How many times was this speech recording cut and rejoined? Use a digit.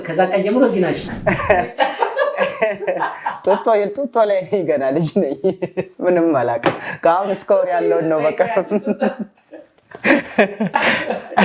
1